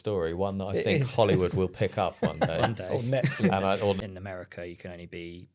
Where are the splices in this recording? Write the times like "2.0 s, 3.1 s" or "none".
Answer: 4.0 s